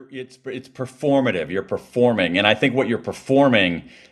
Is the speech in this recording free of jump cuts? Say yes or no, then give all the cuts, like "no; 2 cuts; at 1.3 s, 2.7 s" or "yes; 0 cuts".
yes; 0 cuts